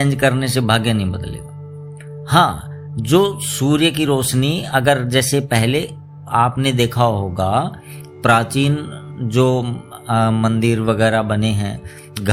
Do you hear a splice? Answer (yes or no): no